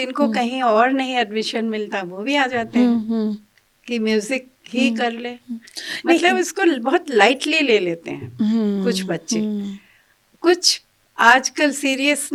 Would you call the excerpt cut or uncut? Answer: uncut